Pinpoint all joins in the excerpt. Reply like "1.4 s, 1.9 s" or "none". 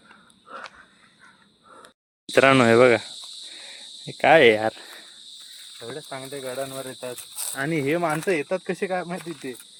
none